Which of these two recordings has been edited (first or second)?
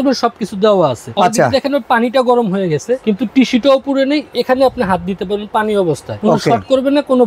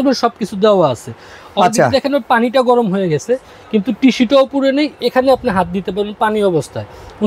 first